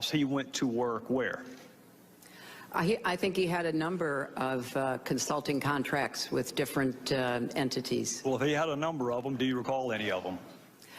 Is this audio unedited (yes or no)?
no